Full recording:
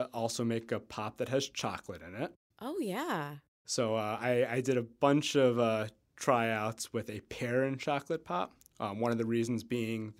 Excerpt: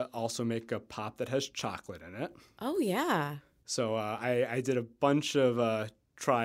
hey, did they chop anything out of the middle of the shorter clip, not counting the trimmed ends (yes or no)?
no